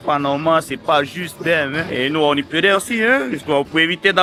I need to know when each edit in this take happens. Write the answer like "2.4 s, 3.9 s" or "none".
none